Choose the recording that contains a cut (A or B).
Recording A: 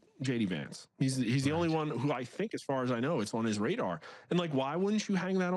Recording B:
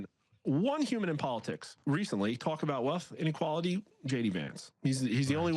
B